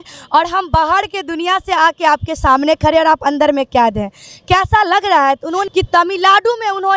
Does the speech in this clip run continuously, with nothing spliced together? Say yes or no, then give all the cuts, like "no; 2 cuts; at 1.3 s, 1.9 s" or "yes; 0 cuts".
no; 1 cut; at 5.6 s